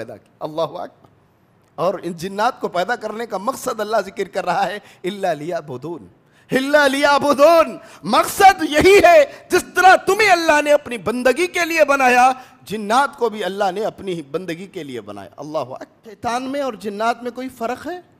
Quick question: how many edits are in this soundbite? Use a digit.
1